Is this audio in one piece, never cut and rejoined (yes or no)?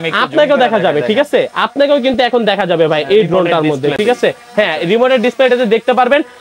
yes